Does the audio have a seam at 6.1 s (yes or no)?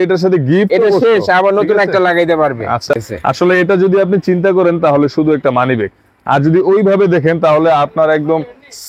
no